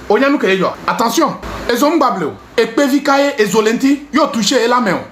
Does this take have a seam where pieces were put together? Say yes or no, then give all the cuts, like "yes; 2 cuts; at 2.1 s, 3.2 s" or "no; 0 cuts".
yes; 3 cuts; at 0.8 s, 1.5 s, 2.4 s